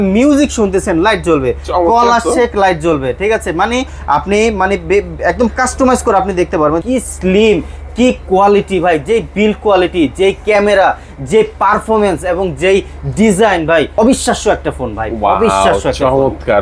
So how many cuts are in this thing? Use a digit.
2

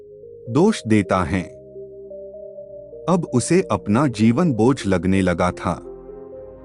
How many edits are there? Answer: 0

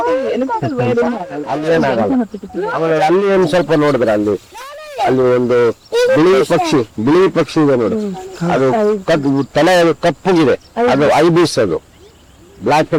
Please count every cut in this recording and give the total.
0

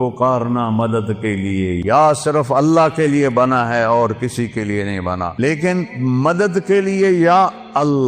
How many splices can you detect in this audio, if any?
2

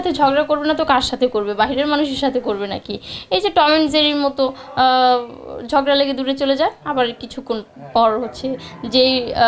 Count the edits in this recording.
0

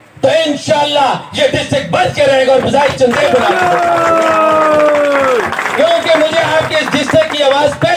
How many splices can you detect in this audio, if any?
0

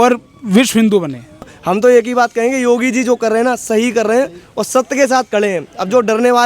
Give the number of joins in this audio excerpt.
1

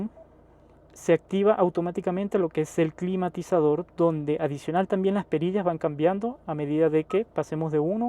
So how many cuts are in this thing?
0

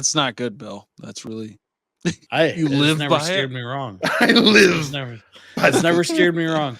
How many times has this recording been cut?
1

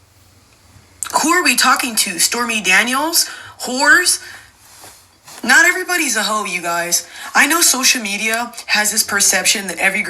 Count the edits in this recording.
0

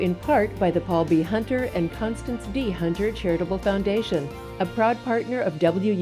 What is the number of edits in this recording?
0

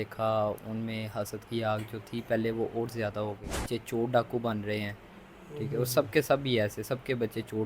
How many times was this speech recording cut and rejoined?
1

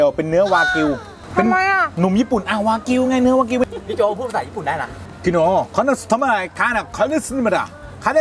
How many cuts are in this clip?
2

